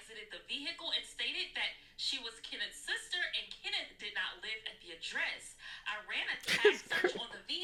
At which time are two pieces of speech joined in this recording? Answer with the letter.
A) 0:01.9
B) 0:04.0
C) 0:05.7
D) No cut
D